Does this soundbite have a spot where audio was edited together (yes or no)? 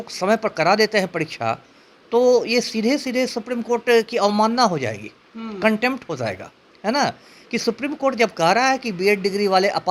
no